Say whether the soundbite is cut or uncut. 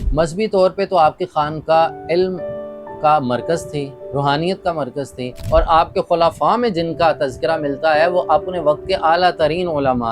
cut